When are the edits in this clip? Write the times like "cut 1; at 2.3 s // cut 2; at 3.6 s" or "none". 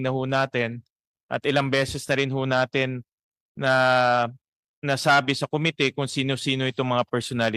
none